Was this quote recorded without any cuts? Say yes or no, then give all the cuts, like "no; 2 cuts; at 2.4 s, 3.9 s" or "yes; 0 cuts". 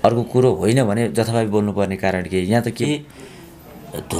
no; 1 cut; at 2.7 s